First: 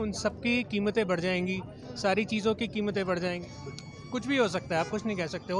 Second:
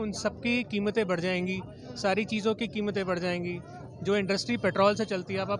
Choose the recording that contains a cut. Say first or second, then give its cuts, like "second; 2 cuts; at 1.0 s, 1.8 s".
first; 1 cut; at 3.4 s